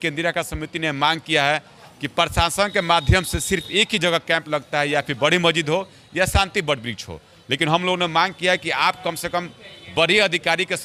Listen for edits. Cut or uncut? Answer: uncut